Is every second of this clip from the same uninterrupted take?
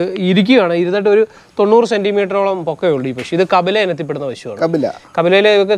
yes; 0 cuts

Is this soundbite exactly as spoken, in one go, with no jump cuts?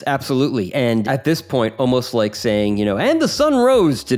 no; 1 cut; at 1.0 s

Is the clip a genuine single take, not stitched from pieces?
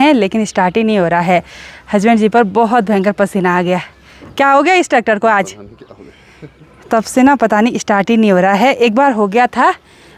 yes; 0 cuts

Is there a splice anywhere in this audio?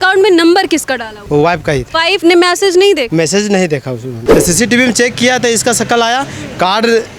yes; 4 cuts; at 1.1 s, 2.1 s, 3.1 s, 4.1 s

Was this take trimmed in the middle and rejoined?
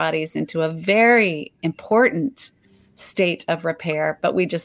no; 0 cuts

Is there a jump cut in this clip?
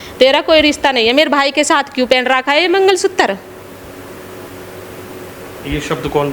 no; 0 cuts

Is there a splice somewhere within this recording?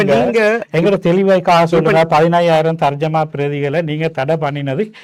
no; 0 cuts

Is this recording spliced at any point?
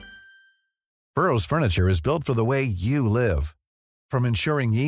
yes; 1 cut; at 1.0 s

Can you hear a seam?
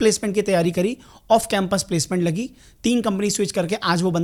no; 0 cuts

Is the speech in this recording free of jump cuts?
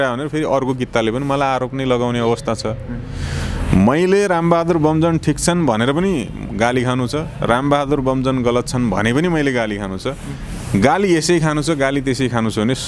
yes; 0 cuts

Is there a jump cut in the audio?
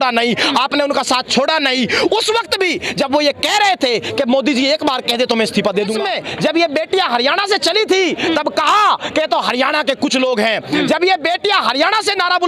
yes; 1 cut; at 6.0 s

